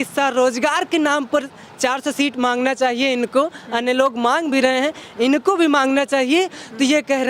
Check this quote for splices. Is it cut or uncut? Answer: uncut